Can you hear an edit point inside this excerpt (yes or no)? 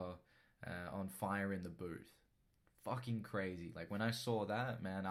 no